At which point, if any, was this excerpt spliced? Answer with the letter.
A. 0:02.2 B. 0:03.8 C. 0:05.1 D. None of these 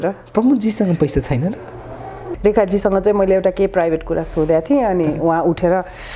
A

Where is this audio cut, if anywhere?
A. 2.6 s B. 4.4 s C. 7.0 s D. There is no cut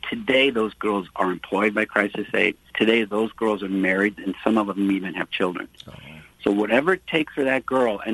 A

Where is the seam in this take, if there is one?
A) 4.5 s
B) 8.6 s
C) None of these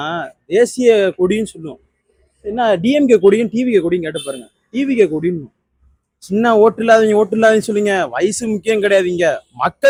C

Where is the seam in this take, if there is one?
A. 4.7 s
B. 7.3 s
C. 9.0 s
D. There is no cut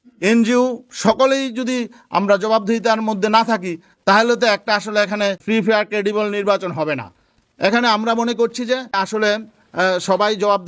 C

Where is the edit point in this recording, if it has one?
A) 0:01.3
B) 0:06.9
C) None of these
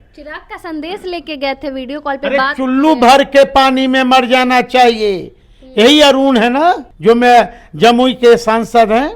B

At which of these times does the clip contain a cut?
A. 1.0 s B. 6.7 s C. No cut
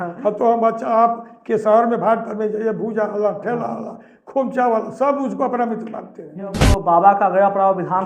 B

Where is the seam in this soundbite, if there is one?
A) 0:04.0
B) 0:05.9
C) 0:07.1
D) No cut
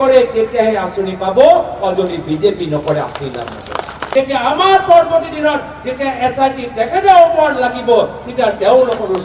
A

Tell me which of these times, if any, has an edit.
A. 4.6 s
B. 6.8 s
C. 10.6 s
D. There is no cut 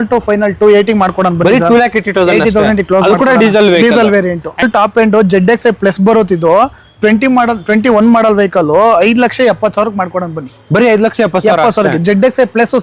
A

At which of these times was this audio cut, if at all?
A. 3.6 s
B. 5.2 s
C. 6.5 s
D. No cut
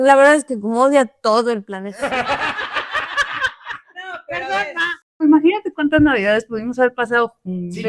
B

